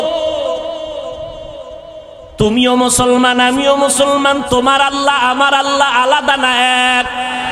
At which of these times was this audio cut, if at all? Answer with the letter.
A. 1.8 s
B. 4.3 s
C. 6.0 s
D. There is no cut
D